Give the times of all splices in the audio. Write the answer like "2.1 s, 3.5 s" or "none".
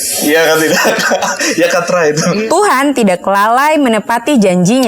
2.4 s

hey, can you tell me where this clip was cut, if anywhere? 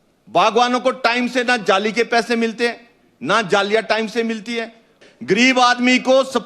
5.0 s

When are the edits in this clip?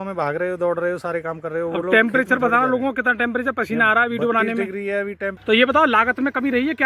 5.3 s

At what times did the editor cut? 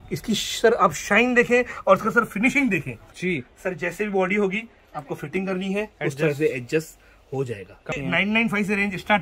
3.0 s, 7.9 s

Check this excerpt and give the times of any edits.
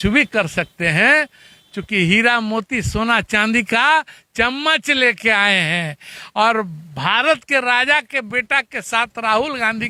none

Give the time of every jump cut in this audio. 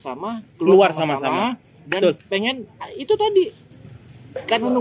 none

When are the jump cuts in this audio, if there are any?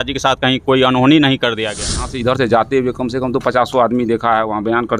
2.1 s

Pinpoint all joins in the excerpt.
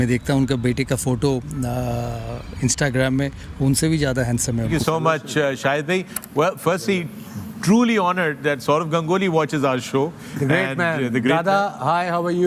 4.7 s

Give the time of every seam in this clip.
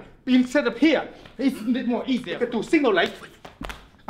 2.3 s

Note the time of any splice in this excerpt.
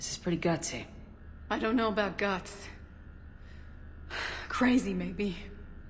none

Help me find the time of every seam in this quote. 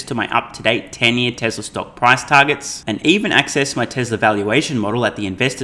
none

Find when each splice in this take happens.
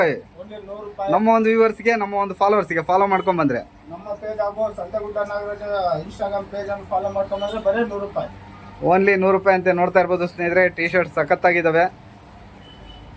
none

